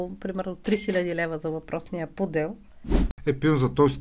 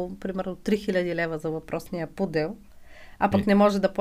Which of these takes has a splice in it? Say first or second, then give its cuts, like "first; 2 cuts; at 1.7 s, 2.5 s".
first; 1 cut; at 3.1 s